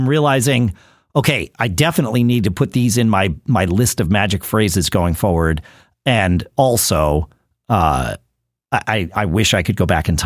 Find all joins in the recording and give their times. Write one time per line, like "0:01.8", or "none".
none